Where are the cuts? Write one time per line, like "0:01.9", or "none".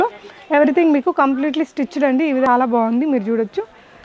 0:02.5